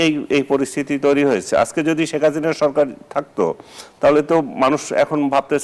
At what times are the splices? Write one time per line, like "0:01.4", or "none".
none